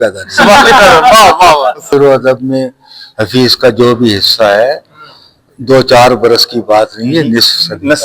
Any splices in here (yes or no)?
yes